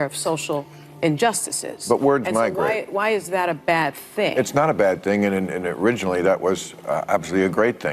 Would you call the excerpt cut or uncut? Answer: cut